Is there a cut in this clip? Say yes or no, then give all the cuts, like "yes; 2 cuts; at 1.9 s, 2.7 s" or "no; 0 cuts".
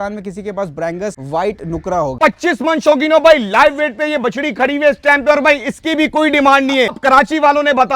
yes; 3 cuts; at 1.2 s, 2.1 s, 7.0 s